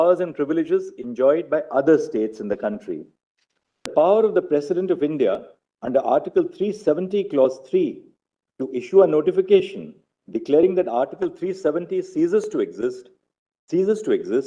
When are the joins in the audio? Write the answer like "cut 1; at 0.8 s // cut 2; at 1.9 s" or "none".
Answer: cut 1; at 3.9 s